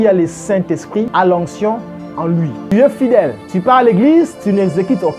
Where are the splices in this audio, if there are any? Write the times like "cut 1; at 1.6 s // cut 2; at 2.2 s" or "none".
cut 1; at 1.1 s // cut 2; at 2.6 s // cut 3; at 3.4 s